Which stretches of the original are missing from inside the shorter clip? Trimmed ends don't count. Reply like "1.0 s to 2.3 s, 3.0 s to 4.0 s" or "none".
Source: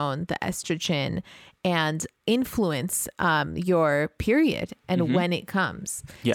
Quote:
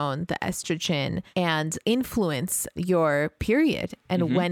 1.6 s to 2.0 s, 3.1 s to 3.5 s